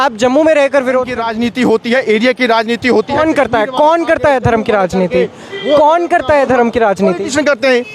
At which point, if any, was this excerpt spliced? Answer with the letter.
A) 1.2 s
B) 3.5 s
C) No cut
A